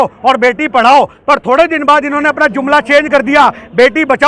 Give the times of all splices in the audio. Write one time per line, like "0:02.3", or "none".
none